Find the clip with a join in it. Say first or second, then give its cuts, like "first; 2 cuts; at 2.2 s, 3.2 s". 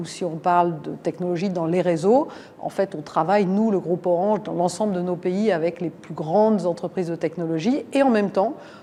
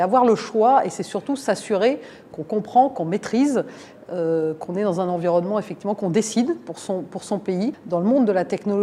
second; 1 cut; at 7.8 s